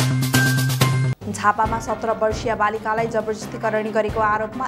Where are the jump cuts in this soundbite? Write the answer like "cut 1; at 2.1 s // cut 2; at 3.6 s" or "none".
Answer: none